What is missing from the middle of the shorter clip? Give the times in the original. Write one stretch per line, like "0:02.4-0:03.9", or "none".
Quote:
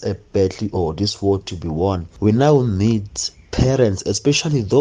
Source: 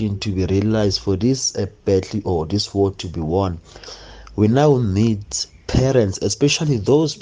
0:03.6-0:04.2